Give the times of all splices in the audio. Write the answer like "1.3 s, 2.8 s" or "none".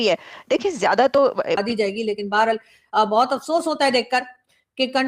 1.6 s